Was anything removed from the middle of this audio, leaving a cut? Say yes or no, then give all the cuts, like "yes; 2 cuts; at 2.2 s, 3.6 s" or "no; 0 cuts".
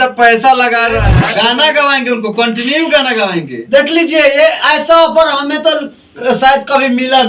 yes; 1 cut; at 1.2 s